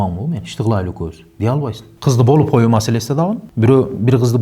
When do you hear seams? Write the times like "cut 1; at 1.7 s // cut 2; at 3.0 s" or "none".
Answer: cut 1; at 1.9 s